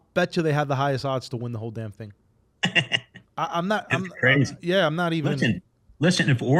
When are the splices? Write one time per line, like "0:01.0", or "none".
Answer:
none